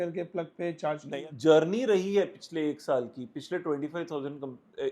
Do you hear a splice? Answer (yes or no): yes